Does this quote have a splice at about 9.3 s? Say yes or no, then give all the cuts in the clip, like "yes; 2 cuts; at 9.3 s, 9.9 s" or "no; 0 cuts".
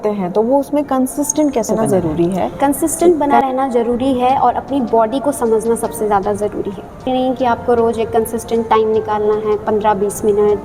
no; 2 cuts; at 1.7 s, 7.1 s